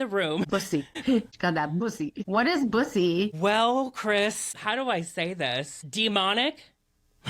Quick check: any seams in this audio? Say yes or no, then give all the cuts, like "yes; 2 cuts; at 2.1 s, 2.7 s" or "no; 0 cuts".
yes; 2 cuts; at 0.8 s, 5.8 s